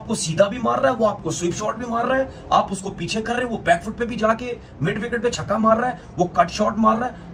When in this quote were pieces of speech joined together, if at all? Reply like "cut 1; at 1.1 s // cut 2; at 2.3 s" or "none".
none